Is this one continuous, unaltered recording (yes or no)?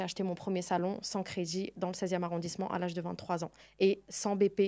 yes